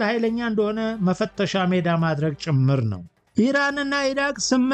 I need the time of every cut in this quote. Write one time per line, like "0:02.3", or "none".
0:03.2